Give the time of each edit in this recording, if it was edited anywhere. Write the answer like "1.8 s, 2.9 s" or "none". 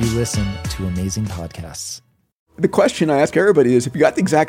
2.5 s